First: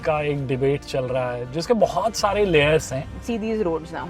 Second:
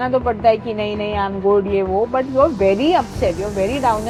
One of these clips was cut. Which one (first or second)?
first